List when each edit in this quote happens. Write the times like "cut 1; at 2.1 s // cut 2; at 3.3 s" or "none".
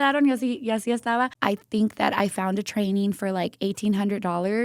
cut 1; at 1.3 s

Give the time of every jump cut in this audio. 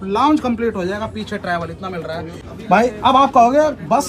cut 1; at 2.4 s

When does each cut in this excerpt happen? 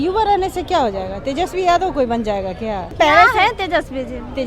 none

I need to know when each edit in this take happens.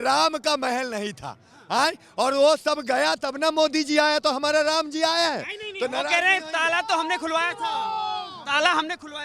none

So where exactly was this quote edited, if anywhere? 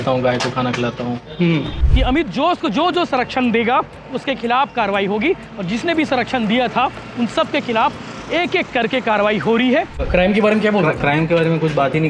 cut 1; at 1.8 s // cut 2; at 10.0 s

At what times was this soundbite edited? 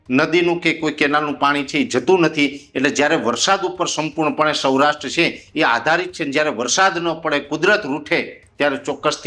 none

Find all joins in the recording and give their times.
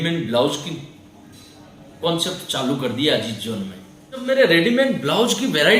cut 1; at 4.2 s

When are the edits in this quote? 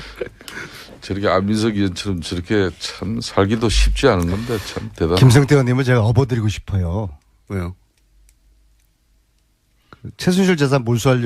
none

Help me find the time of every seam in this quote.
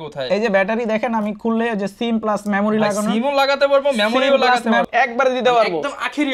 cut 1; at 4.9 s

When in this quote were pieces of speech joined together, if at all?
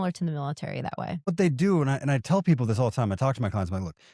cut 1; at 1.3 s

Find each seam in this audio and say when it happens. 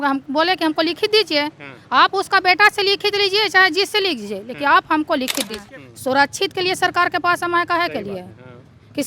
cut 1; at 5.6 s

